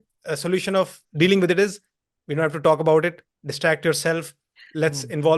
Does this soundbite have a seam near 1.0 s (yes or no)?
yes